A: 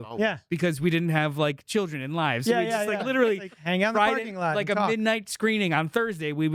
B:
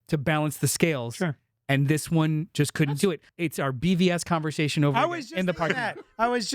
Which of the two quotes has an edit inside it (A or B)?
B